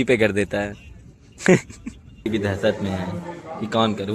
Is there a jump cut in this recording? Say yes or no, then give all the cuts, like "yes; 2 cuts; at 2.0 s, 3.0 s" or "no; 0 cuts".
yes; 1 cut; at 2.3 s